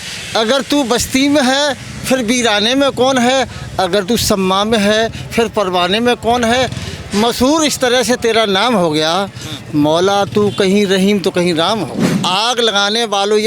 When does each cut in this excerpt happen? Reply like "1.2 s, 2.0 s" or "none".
12.1 s